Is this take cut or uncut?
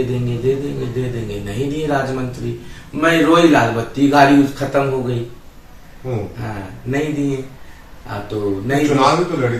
uncut